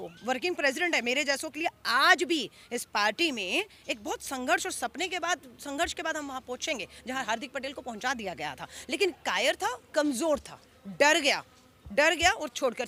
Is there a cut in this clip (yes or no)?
no